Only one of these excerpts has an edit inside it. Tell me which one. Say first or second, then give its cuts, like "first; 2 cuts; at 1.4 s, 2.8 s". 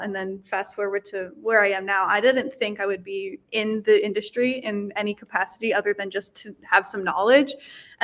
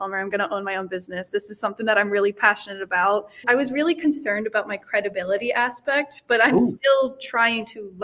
second; 1 cut; at 3.5 s